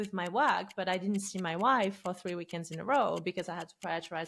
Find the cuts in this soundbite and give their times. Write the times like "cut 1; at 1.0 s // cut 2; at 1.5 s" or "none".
none